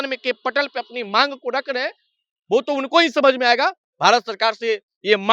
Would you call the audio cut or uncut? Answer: cut